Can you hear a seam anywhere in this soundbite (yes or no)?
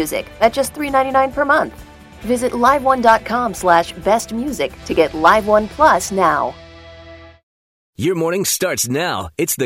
yes